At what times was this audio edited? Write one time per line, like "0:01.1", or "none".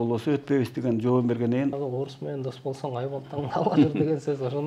0:01.8